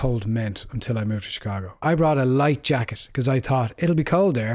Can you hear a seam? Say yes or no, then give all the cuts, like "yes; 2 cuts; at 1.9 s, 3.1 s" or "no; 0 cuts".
yes; 1 cut; at 1.7 s